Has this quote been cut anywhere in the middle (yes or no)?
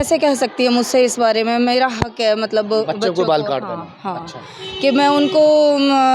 no